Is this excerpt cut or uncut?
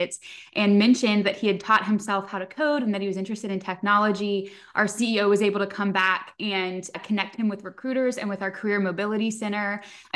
uncut